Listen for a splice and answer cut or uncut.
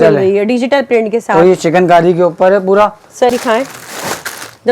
cut